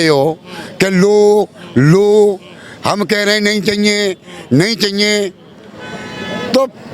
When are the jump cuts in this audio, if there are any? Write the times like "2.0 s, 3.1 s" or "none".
none

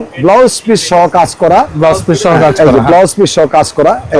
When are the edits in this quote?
none

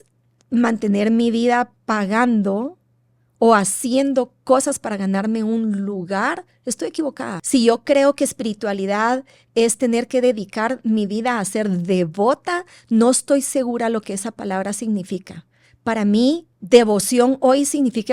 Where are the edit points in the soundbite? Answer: 1.8 s, 7.4 s, 16.5 s

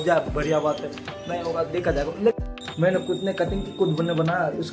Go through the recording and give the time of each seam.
2.3 s

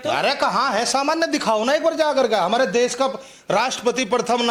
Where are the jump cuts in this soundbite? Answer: none

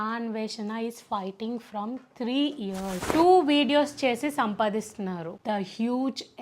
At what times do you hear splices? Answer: 3.1 s

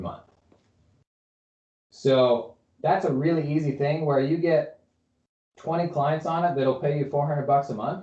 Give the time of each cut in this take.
none

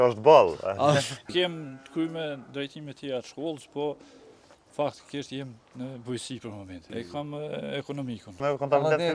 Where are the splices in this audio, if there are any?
1.3 s, 6.7 s, 8.4 s

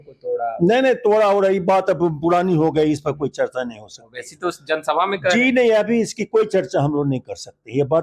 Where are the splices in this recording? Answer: none

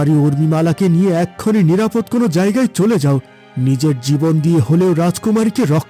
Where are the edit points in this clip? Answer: none

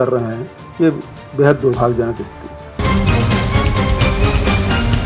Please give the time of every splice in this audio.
2.8 s

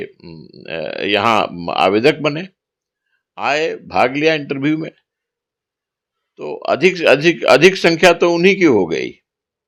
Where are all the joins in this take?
none

